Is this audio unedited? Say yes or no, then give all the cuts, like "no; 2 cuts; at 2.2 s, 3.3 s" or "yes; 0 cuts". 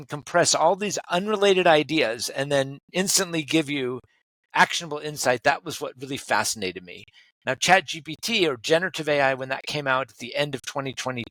yes; 0 cuts